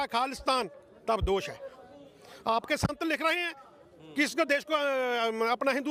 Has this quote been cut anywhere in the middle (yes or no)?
no